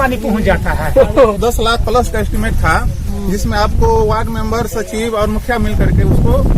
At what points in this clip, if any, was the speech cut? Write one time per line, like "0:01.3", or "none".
0:01.4